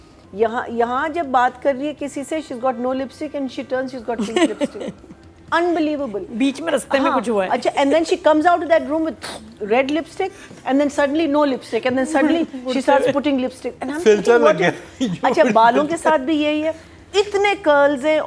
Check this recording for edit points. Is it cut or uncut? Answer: uncut